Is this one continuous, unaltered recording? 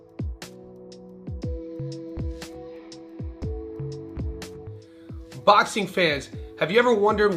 no; 2 cuts; at 2.6 s, 4.8 s

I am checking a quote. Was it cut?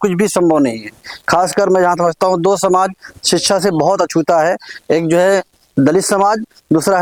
no; 0 cuts

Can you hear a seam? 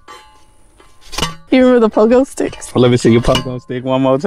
yes; 2 cuts; at 1.3 s, 2.7 s

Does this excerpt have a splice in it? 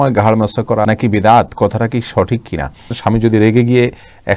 yes; 2 cuts; at 0.8 s, 3.0 s

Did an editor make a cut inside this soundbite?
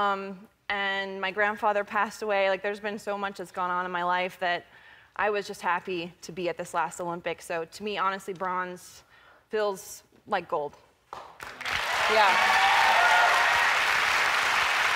no; 0 cuts

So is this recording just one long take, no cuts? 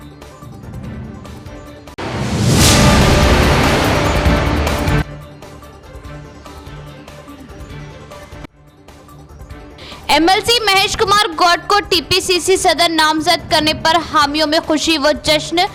yes; 0 cuts

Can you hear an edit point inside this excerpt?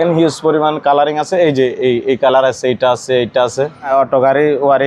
yes; 1 cut; at 3.9 s

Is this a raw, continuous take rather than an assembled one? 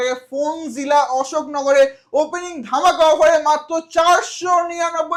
yes; 0 cuts

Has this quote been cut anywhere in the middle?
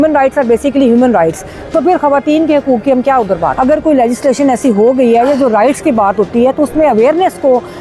yes; 1 cut; at 3.5 s

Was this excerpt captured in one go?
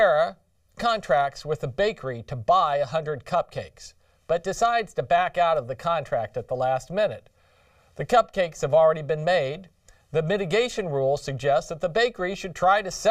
no; 1 cut; at 7.4 s

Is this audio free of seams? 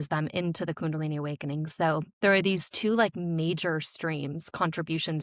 yes; 0 cuts

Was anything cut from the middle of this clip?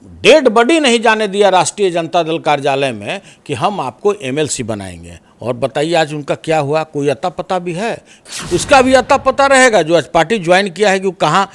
yes; 1 cut; at 8.2 s

